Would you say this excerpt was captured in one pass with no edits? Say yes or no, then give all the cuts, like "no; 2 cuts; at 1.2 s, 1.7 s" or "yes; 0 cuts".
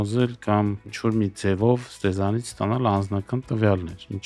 yes; 0 cuts